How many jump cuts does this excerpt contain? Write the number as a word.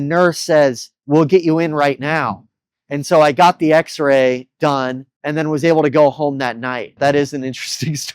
two